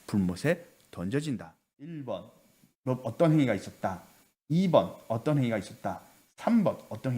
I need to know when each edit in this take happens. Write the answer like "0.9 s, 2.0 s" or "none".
2.0 s